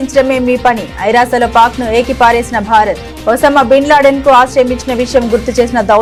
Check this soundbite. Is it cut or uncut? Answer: uncut